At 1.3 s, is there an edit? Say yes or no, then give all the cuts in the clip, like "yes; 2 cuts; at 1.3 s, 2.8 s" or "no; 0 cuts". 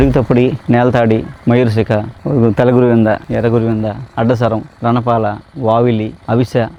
no; 0 cuts